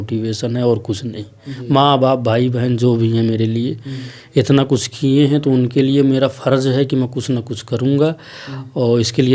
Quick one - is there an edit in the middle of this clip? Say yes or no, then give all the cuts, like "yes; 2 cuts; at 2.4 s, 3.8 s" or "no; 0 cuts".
no; 0 cuts